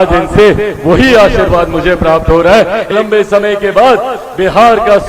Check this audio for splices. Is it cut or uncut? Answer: cut